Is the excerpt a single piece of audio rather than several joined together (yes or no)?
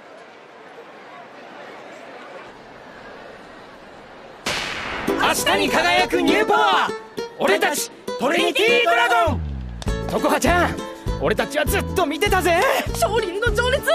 no